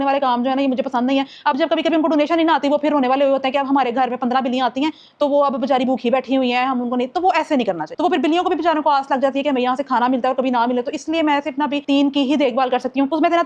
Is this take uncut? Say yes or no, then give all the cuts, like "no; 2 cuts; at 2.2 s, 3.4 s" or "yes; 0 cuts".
yes; 0 cuts